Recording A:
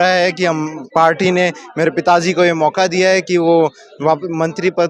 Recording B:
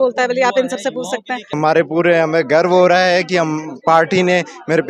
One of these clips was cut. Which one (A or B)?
B